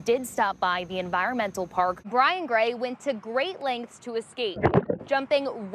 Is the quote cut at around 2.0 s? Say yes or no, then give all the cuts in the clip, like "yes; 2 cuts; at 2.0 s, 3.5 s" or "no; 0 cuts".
yes; 1 cut; at 2.0 s